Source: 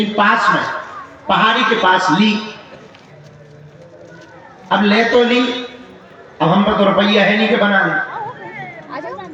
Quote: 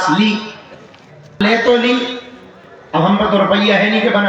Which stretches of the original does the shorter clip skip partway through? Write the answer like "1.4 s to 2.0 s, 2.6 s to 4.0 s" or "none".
3.4 s to 4.9 s